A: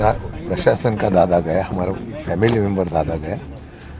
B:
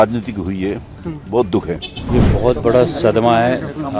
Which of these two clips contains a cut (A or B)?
B